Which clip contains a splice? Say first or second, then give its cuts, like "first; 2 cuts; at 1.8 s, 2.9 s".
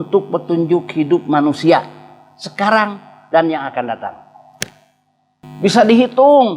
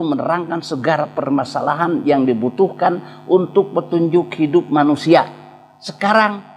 first; 1 cut; at 5.4 s